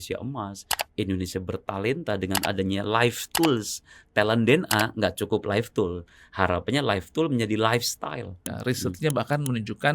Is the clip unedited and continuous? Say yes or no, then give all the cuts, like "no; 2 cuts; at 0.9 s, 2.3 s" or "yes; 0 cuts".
no; 1 cut; at 8.4 s